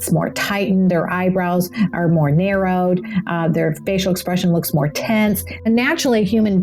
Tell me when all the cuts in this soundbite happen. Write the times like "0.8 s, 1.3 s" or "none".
5.7 s